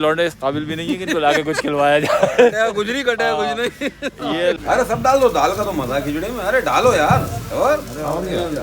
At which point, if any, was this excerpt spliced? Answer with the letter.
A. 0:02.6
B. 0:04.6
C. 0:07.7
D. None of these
B